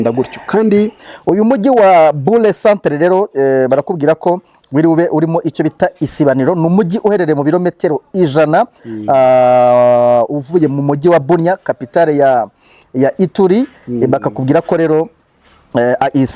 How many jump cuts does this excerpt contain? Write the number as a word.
one